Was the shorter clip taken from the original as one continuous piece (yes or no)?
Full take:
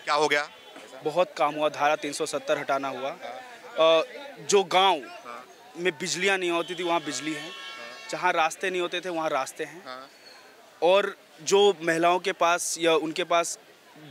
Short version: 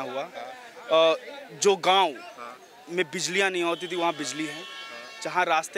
yes